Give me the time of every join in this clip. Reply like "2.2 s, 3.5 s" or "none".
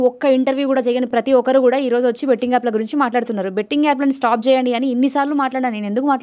none